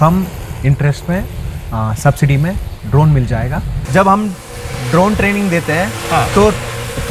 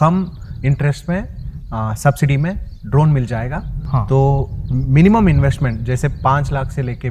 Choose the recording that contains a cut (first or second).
first